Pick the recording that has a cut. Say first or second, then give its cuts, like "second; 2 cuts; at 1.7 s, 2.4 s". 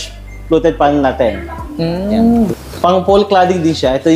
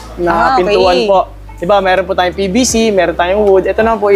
first; 1 cut; at 2.5 s